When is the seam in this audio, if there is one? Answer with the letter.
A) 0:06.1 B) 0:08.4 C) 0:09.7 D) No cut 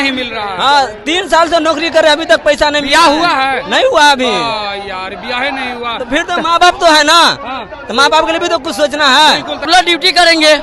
C